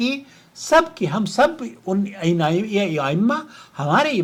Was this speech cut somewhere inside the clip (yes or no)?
no